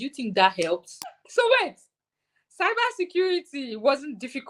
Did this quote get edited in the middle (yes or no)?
yes